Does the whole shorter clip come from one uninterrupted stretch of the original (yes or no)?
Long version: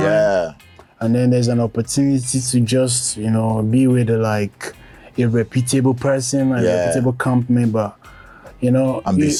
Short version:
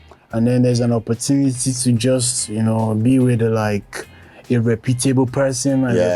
yes